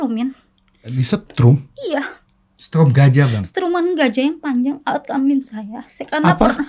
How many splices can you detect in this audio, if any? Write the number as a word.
zero